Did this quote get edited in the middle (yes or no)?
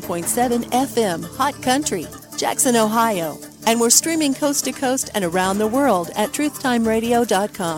no